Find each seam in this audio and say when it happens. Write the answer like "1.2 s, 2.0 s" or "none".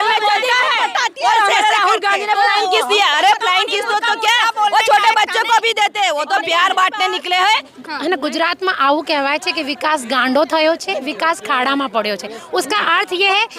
7.7 s

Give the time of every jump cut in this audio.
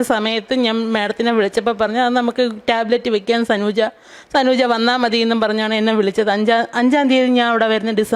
none

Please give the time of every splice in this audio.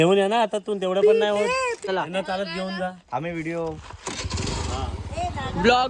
1.9 s

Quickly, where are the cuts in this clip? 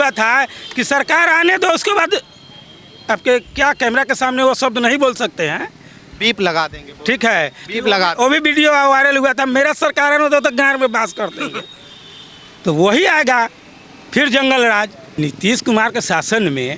15.0 s

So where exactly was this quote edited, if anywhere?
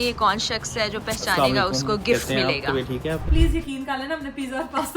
3.3 s

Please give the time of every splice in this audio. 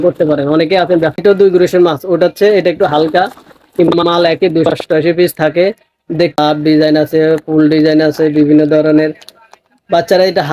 1.2 s, 6.4 s

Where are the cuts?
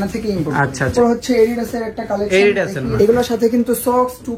0.9 s, 2.8 s

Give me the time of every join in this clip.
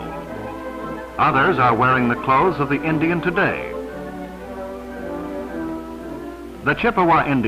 3.9 s

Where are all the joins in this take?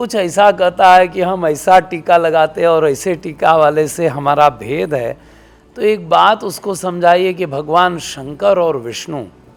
none

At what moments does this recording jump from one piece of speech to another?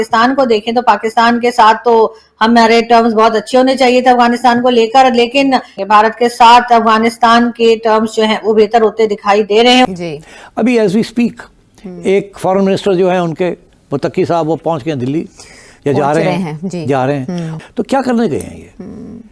5.8 s, 9.9 s, 17.5 s

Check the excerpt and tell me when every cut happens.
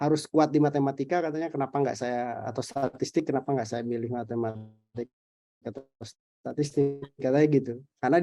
none

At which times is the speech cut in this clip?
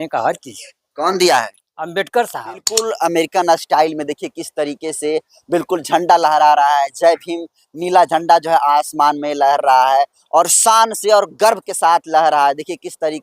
2.7 s

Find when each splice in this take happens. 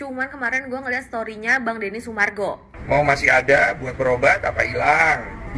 2.7 s

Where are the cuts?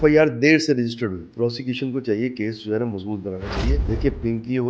1.3 s, 3.8 s

